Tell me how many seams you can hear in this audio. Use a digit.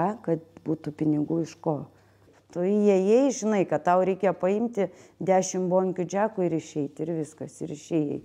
1